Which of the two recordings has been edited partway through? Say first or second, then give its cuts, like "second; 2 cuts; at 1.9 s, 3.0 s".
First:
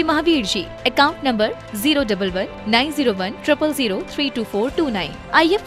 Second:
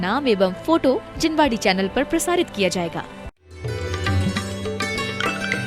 second; 1 cut; at 3.3 s